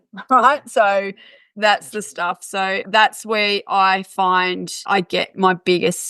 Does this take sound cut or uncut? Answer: cut